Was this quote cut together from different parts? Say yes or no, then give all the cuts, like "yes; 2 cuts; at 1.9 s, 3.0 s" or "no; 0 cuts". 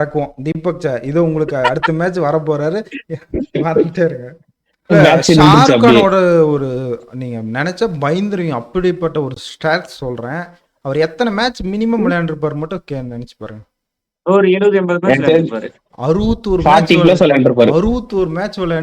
yes; 1 cut; at 4.9 s